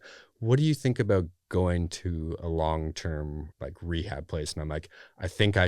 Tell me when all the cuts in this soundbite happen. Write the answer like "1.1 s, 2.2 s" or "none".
3.5 s